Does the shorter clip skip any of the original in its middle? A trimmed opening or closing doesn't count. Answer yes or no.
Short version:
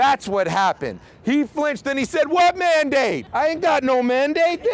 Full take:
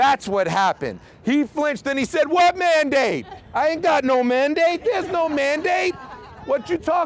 yes